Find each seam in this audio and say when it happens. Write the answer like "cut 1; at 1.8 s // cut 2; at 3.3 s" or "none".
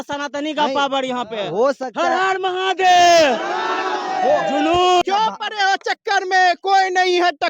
cut 1; at 5.0 s

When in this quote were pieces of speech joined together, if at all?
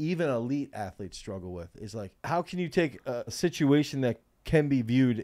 cut 1; at 2.1 s // cut 2; at 3.4 s

